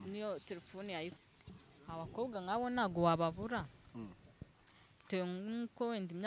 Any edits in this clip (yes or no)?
yes